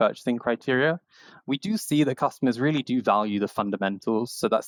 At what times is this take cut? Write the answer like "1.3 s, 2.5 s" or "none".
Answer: none

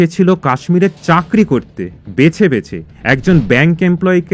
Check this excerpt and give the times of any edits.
none

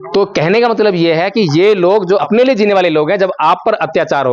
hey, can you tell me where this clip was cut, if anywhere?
2.2 s

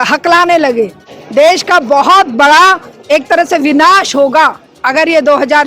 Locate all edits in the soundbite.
1.0 s

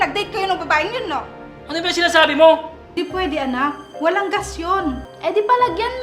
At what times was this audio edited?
3.0 s, 5.1 s

